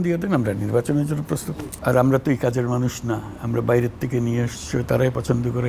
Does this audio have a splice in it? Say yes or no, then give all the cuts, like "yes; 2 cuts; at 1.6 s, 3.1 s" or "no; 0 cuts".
yes; 1 cut; at 1.3 s